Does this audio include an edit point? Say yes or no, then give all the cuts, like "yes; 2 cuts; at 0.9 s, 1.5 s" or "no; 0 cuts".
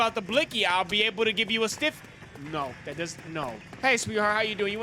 yes; 1 cut; at 3.7 s